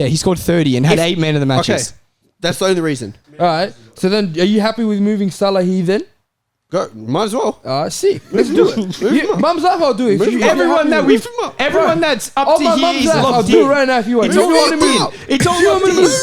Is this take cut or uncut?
cut